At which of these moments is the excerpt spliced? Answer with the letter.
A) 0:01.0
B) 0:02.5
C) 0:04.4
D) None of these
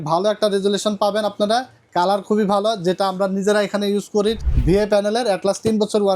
C